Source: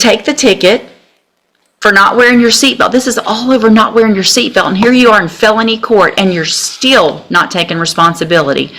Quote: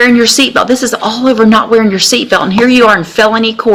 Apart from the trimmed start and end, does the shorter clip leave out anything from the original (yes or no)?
no